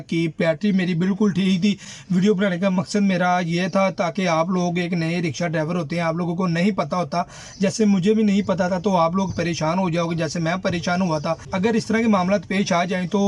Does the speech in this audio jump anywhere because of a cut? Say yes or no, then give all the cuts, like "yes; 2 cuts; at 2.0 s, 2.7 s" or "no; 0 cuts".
no; 0 cuts